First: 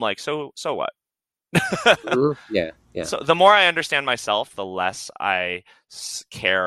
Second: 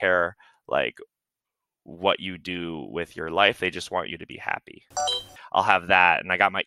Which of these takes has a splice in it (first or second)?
second